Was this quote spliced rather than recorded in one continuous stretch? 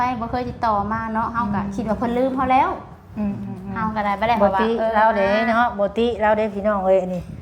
no; 0 cuts

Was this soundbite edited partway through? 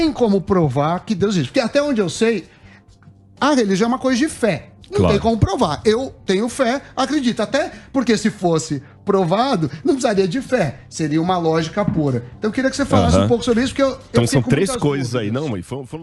no; 0 cuts

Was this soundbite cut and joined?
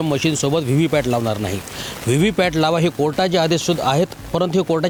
no; 0 cuts

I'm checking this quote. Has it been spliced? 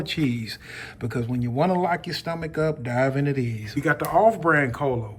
yes; 1 cut; at 3.6 s

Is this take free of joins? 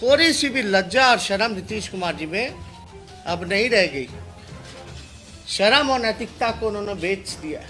no; 2 cuts; at 4.1 s, 5.5 s

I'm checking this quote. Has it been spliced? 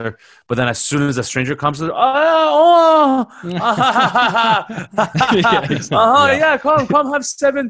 no; 0 cuts

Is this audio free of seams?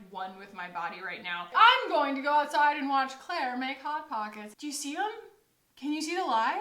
no; 2 cuts; at 1.5 s, 4.4 s

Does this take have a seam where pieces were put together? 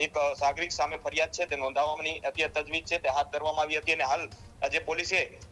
no; 0 cuts

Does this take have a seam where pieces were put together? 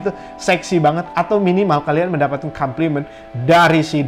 no; 0 cuts

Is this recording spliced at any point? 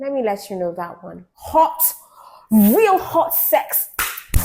yes; 1 cut; at 1.3 s

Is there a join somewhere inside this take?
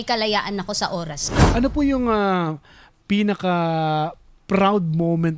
yes; 1 cut; at 1.5 s

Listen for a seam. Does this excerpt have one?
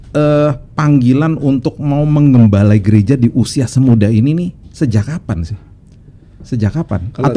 no; 0 cuts

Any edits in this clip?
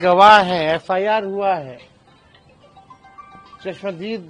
no; 0 cuts

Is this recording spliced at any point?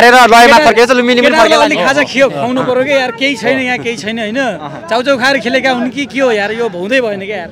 no; 0 cuts

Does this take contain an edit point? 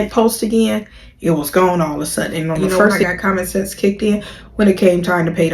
yes; 1 cut; at 3.0 s

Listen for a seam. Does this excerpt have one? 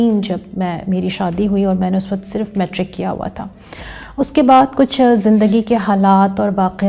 no; 0 cuts

